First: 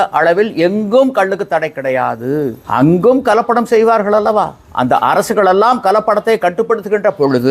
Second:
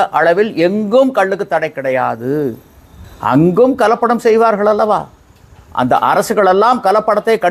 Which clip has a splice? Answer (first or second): first